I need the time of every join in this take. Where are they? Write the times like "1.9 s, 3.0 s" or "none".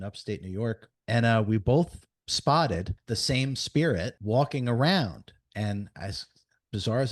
0.9 s, 2.9 s, 4.2 s